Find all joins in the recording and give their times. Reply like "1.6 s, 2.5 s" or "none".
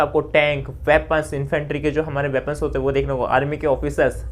none